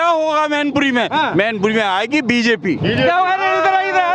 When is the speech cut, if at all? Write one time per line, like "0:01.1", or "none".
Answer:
none